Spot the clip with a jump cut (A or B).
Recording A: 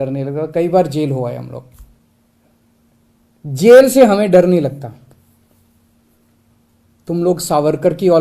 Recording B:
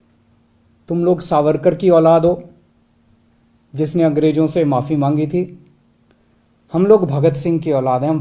A